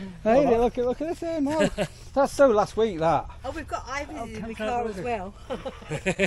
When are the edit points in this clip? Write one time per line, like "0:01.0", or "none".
none